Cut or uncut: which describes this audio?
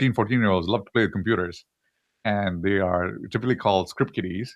cut